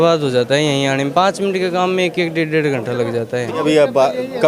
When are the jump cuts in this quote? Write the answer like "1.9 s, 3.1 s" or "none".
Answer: 3.5 s